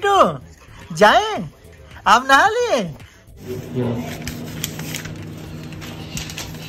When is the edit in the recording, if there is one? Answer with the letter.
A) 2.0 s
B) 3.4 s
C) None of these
B